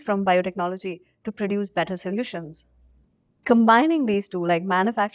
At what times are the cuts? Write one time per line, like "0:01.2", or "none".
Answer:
0:02.9

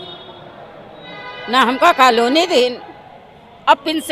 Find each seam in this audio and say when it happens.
none

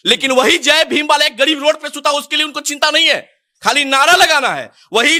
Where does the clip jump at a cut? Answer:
none

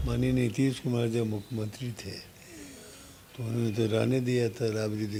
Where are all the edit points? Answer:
none

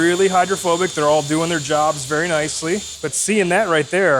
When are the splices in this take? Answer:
0:02.9

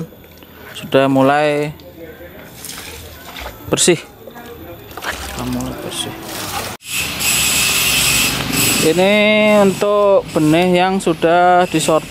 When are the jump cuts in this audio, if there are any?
0:06.9

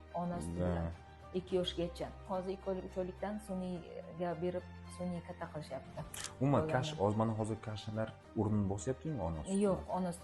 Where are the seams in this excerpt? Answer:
0:02.2

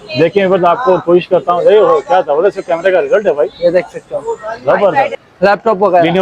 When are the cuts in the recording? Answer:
0:05.1

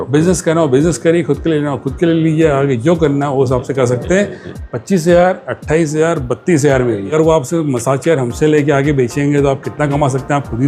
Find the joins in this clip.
0:04.6
0:07.1

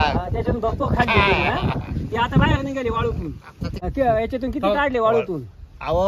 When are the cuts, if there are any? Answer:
0:03.8

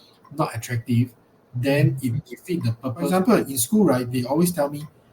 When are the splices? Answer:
0:03.1

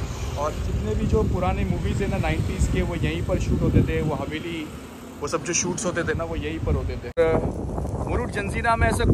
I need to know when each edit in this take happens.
0:07.2

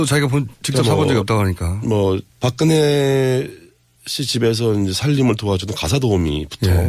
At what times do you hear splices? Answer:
0:02.9

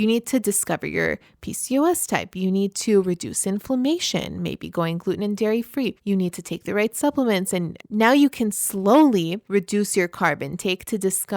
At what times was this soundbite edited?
0:06.0
0:07.8
0:09.4

